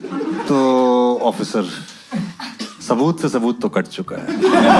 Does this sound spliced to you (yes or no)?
no